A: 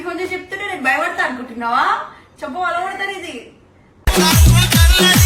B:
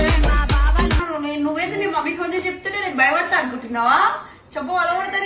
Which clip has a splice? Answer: B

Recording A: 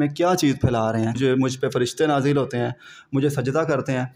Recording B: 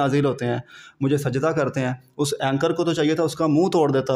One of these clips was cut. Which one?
A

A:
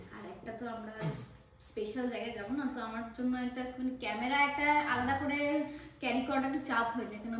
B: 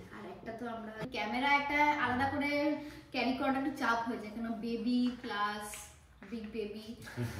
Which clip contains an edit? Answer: B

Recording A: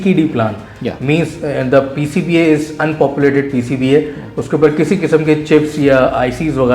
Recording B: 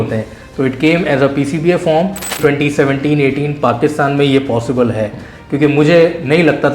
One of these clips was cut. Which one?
B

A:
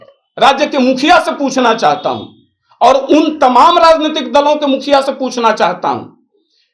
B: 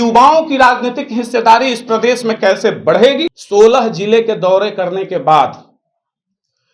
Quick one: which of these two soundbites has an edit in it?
B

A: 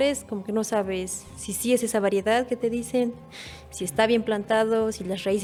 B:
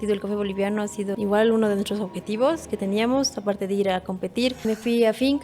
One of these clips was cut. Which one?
B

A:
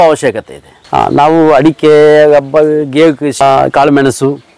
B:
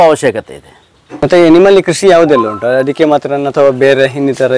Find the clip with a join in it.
A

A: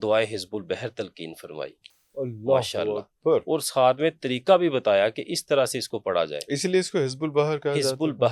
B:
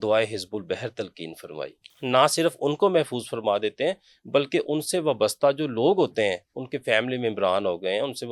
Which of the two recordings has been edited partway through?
B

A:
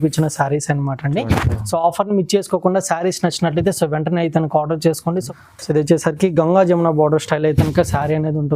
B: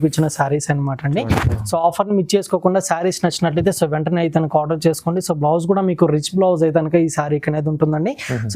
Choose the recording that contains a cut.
A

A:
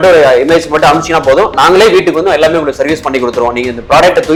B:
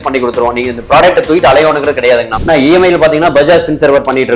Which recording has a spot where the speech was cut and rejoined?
B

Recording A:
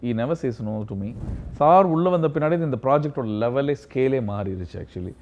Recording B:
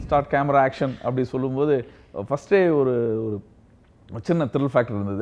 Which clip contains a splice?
A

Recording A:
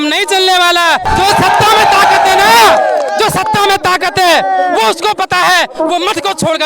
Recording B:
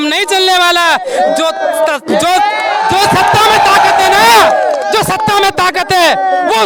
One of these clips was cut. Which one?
A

